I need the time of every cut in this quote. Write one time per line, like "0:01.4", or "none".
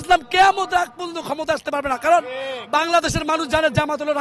none